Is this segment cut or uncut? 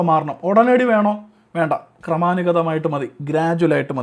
uncut